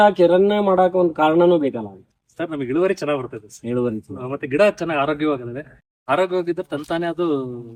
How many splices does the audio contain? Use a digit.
0